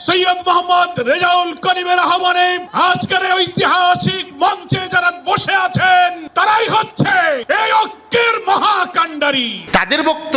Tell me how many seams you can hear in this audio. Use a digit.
0